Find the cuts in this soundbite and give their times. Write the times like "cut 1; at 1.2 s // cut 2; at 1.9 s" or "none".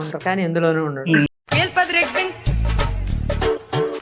cut 1; at 1.3 s